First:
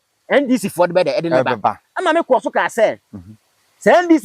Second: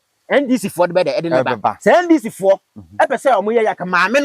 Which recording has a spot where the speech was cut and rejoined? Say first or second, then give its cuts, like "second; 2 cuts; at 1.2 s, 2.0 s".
second; 1 cut; at 1.8 s